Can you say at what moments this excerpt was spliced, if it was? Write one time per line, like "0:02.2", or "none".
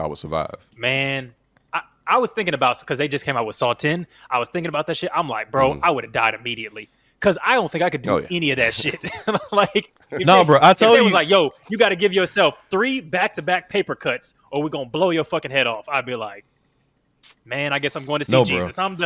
none